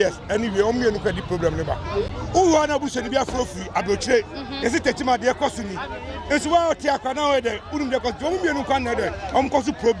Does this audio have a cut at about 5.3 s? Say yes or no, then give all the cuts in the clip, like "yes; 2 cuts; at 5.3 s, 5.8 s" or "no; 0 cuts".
no; 1 cut; at 2.2 s